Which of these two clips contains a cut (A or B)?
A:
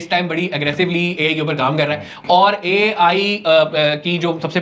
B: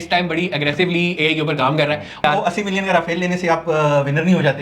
B